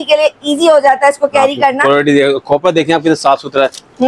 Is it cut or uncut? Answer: uncut